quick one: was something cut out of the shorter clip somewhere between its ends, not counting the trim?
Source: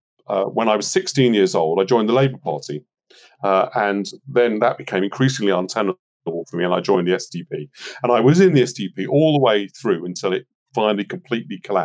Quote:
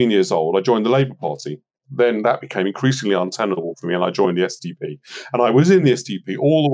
yes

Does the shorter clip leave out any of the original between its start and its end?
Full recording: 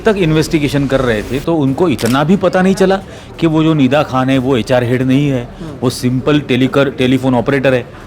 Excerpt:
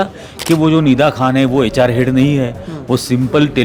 no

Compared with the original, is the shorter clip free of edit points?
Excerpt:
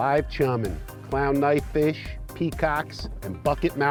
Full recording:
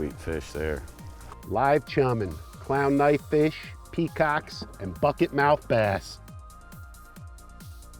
yes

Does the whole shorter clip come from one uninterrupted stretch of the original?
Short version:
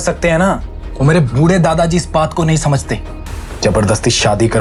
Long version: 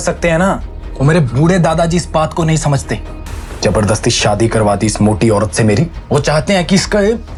yes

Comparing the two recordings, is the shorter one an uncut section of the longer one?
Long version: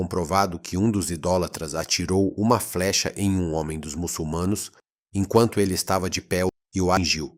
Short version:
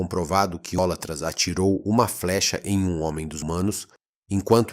no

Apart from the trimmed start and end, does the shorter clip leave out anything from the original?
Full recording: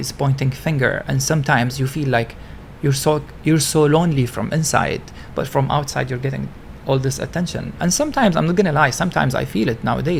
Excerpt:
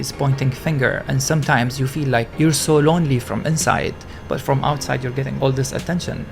yes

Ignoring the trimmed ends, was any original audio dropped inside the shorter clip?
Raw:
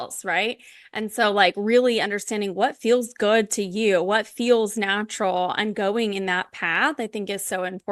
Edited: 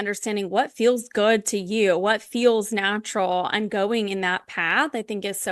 no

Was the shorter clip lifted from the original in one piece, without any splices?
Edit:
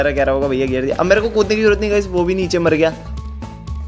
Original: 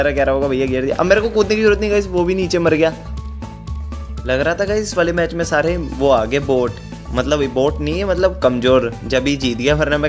yes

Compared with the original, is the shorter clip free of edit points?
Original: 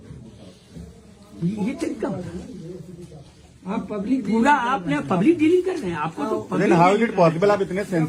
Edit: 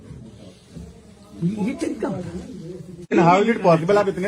no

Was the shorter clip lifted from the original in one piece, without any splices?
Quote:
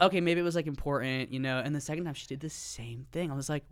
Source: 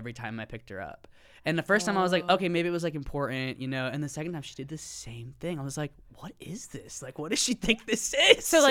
yes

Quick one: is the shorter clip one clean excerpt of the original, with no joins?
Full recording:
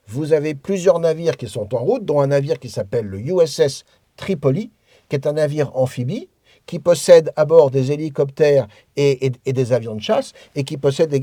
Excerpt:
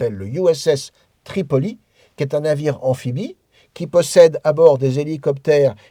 yes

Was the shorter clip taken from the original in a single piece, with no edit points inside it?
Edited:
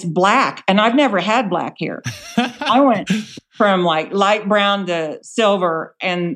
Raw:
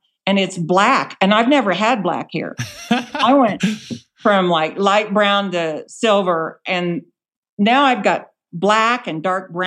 no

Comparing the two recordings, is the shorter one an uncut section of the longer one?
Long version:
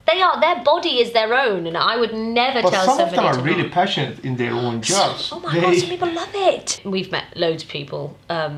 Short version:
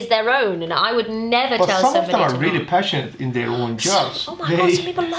yes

